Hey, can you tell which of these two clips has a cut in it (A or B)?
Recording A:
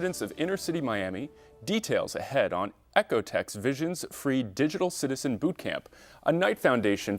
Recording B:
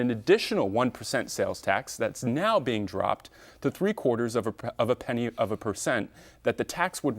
B